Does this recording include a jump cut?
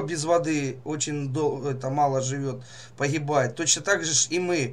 no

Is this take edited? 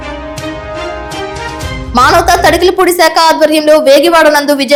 no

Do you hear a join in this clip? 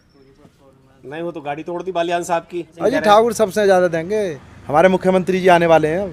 yes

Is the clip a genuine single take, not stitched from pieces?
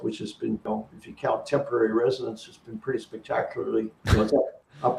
yes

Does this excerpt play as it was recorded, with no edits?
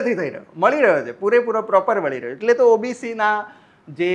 yes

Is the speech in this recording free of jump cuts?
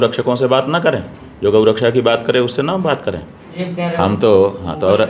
no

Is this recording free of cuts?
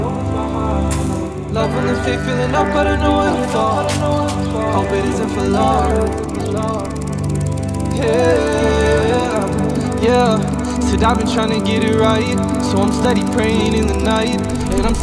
yes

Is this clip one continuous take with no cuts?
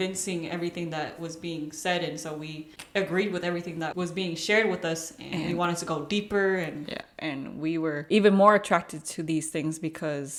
yes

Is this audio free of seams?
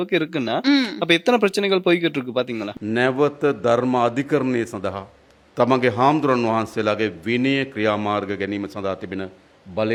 yes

